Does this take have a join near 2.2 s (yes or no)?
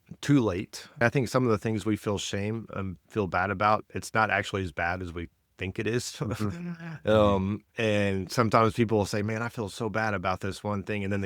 no